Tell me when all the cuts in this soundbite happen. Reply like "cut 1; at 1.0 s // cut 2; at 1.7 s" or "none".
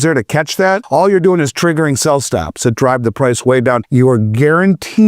cut 1; at 0.8 s // cut 2; at 3.8 s

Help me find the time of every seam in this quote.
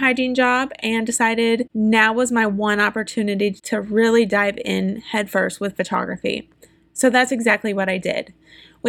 cut 1; at 1.7 s // cut 2; at 3.6 s

